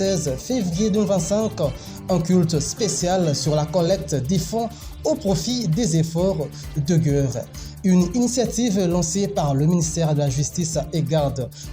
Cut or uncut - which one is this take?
uncut